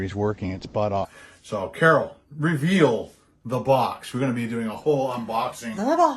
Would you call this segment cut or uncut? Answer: cut